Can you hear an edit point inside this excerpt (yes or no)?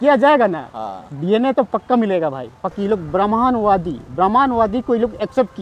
yes